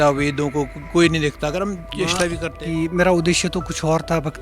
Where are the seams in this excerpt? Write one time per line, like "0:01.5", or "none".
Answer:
0:02.4